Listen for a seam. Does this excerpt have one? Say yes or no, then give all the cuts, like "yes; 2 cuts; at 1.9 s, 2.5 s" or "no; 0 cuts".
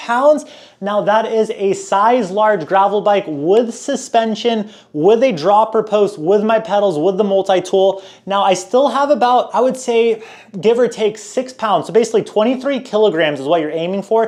no; 0 cuts